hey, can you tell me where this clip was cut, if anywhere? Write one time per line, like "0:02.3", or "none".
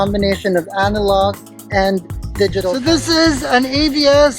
0:02.7